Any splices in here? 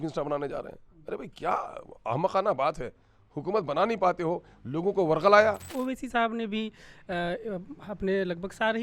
yes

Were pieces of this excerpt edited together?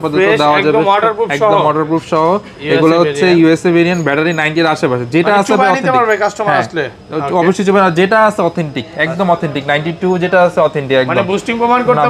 no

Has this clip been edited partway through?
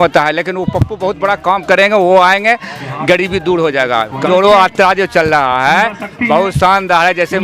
yes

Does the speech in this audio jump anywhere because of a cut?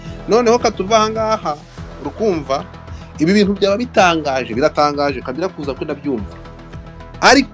no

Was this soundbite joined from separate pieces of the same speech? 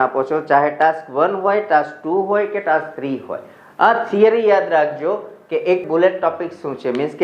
yes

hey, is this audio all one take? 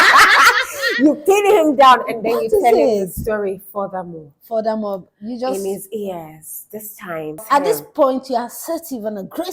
no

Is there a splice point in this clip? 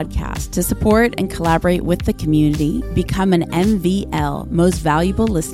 no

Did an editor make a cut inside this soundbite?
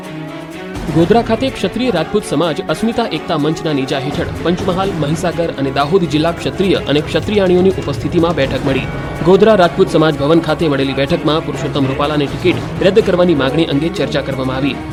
no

